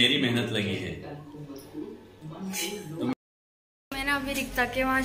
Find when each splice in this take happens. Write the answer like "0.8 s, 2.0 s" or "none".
3.1 s